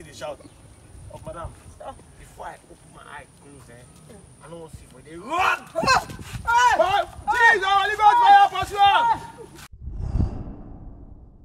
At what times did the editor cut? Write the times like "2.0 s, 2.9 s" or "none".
9.6 s